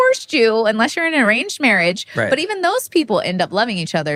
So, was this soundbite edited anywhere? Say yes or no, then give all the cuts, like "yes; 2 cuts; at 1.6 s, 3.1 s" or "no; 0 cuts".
no; 0 cuts